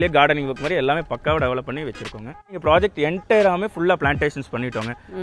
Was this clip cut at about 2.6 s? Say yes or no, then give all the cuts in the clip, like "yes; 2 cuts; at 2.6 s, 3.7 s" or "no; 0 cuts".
yes; 1 cut; at 2.6 s